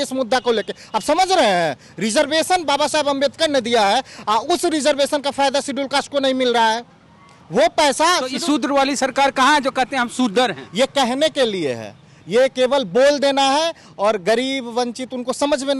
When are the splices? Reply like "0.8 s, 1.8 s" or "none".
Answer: none